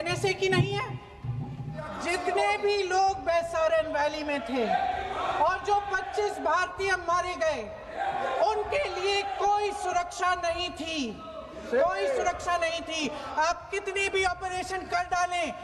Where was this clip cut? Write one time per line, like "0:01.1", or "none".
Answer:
0:01.9